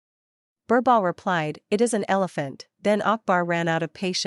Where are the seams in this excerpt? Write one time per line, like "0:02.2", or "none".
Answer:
0:02.6